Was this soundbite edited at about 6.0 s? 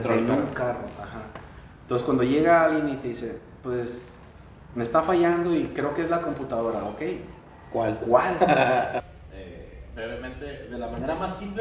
no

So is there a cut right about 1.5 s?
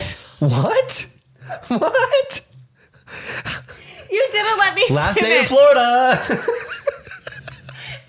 no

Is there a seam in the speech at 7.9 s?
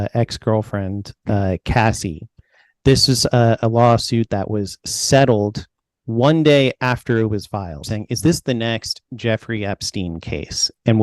yes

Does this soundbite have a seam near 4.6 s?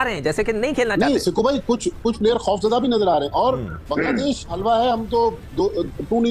yes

